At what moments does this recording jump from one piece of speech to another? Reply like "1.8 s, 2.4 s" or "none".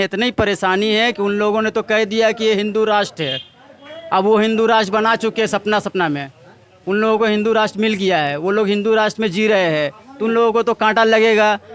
none